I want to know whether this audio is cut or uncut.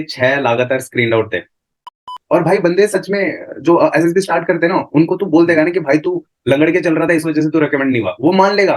cut